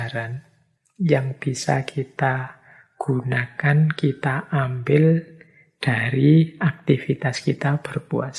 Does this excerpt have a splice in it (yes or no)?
no